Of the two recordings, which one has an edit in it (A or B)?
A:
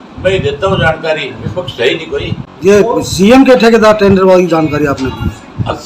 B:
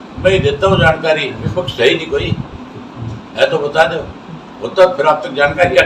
A